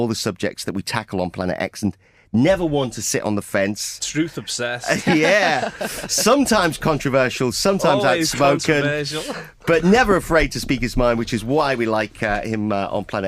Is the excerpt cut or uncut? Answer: cut